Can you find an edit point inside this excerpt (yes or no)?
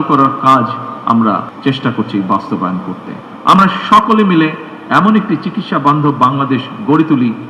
yes